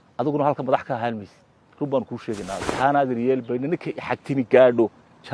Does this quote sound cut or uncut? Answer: cut